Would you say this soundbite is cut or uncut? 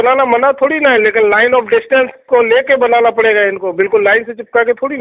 uncut